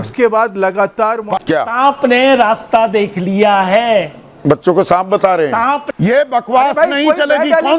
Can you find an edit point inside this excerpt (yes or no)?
yes